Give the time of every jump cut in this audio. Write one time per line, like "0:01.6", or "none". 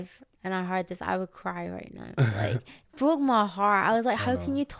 none